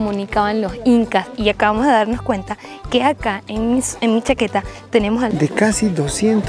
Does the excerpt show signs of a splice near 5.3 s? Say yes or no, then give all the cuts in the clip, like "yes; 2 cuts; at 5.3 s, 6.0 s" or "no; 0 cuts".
yes; 1 cut; at 5.3 s